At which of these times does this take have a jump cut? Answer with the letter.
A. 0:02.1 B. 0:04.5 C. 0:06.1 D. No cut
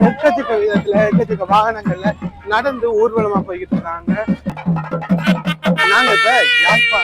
B